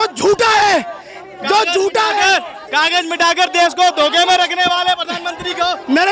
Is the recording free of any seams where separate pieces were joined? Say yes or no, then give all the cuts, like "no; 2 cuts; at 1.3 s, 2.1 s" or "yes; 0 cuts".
yes; 0 cuts